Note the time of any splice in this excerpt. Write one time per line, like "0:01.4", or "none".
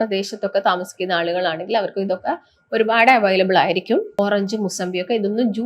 0:04.1

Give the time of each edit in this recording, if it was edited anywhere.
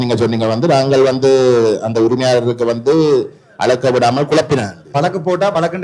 0:04.9

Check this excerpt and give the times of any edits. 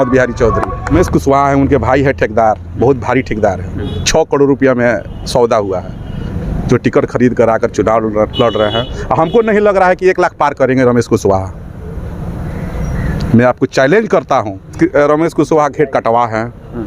0:00.9
0:14.7

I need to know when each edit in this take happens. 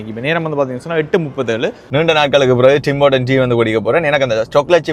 0:01.8

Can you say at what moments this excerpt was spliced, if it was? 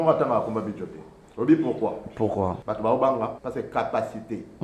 0:02.6
0:03.4

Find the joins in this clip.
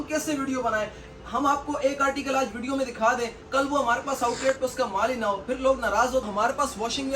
0:06.2

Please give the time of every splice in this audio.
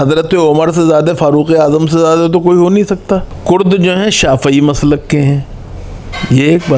0:03.3

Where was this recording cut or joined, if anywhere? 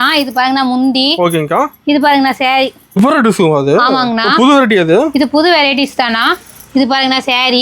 0:03.0

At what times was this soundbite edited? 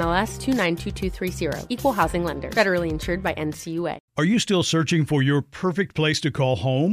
0:04.0

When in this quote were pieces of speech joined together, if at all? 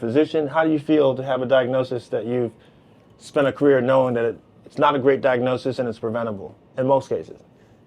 none

